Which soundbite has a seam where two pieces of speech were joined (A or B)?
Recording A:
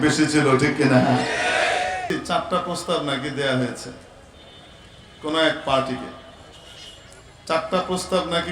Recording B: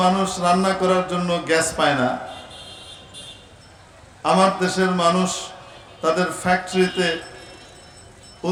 A